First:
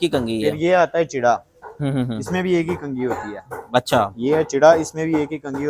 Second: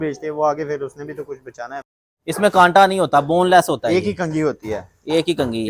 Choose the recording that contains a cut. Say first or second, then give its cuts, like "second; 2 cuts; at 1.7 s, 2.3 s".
second; 1 cut; at 1.9 s